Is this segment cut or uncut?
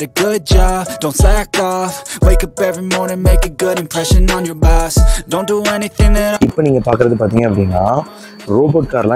cut